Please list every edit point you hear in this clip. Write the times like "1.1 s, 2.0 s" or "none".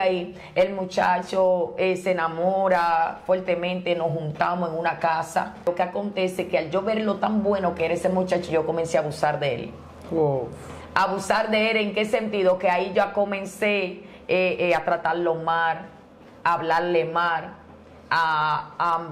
5.7 s